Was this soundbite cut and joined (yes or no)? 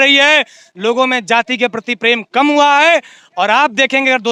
no